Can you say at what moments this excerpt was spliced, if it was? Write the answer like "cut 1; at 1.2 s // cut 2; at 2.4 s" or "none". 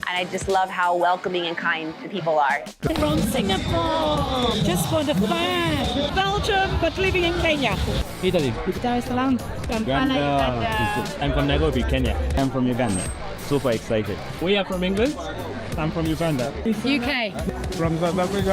cut 1; at 2.8 s